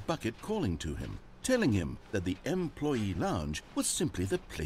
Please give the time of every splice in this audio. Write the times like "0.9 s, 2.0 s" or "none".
3.5 s